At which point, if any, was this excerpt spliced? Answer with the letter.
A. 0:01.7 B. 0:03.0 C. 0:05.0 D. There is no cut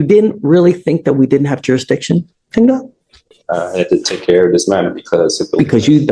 D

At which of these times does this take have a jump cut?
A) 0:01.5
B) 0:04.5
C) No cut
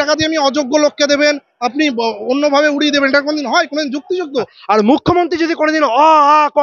B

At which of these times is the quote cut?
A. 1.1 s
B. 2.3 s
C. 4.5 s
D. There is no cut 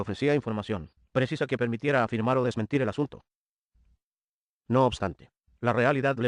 C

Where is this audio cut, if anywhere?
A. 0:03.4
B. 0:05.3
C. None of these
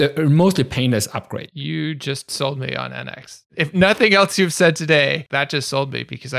B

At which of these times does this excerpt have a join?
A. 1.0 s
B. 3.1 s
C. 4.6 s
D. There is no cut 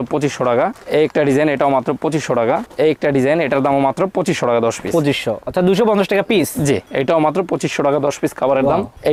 D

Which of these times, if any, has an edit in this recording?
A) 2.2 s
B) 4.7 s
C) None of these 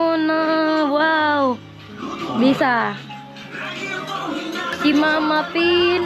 B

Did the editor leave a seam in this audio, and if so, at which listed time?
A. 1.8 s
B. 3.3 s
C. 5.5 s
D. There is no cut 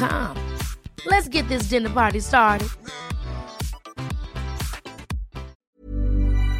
C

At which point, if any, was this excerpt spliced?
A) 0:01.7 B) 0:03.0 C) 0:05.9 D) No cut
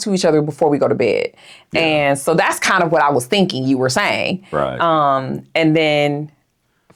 D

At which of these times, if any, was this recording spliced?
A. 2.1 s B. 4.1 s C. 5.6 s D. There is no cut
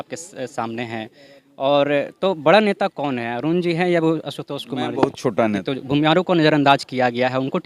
C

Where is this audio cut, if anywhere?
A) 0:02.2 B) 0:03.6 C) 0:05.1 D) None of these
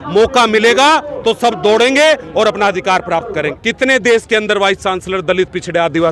B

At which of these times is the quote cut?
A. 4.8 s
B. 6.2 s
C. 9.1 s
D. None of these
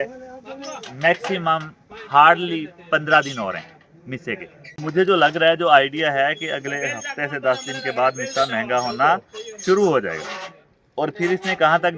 A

